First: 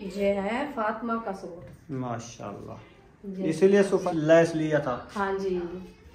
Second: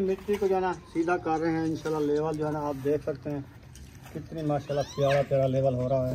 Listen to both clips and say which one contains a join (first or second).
first